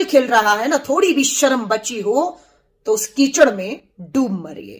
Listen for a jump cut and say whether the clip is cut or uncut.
cut